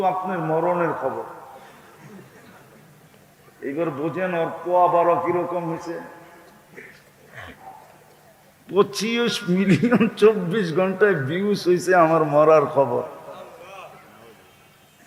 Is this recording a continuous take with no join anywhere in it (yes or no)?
yes